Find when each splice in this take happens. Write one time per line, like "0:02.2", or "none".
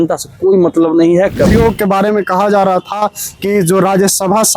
0:01.5